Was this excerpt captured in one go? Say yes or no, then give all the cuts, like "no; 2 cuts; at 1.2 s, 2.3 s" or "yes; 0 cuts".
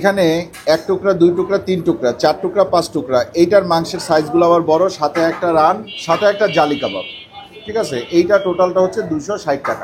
no; 1 cut; at 5.9 s